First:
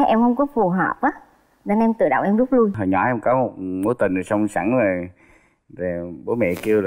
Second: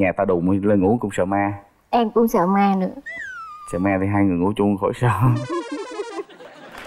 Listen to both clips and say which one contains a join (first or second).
first